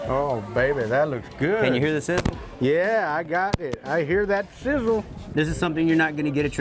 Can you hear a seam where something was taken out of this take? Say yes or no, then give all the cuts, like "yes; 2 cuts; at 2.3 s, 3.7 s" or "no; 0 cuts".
yes; 1 cut; at 5.3 s